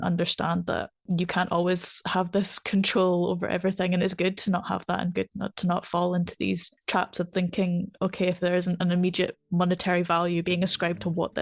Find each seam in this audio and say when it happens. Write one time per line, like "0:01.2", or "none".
none